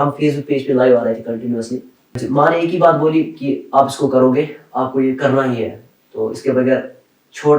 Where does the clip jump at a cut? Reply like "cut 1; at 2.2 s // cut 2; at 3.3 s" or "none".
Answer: cut 1; at 2.2 s